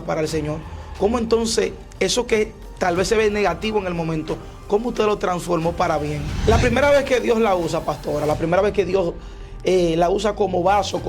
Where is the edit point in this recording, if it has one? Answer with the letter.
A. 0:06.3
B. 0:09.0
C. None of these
A